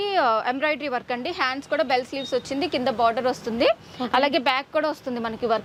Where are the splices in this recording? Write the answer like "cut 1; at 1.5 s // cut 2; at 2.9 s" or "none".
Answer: none